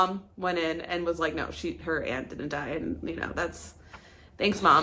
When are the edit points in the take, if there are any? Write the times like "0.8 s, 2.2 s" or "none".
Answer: none